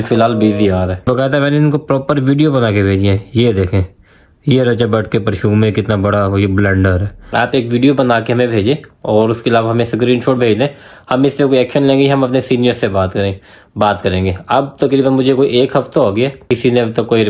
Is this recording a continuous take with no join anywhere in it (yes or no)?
no